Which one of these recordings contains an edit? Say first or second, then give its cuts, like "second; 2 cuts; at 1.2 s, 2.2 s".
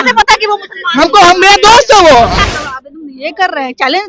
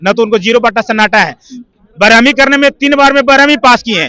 first; 1 cut; at 2.6 s